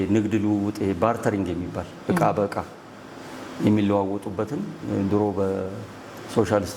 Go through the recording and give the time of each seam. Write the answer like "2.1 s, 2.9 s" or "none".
none

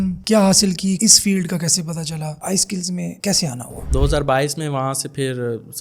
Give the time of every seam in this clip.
1.0 s, 3.8 s

